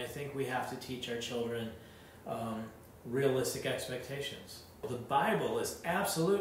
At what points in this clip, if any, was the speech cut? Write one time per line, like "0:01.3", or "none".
0:04.8

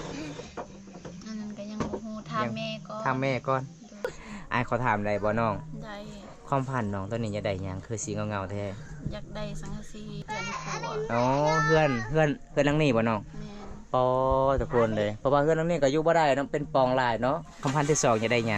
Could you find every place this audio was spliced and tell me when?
0:04.1
0:10.2
0:17.6

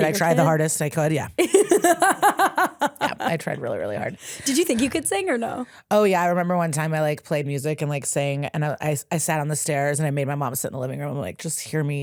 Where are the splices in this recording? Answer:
none

